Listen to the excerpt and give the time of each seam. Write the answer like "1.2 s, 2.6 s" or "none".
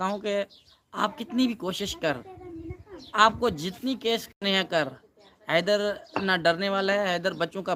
none